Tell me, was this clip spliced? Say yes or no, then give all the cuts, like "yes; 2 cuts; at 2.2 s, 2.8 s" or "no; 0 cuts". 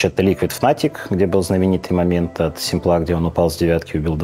no; 0 cuts